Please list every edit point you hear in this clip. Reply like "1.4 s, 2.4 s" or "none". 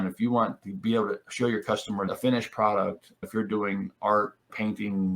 2.1 s